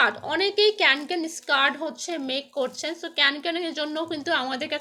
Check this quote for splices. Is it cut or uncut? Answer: uncut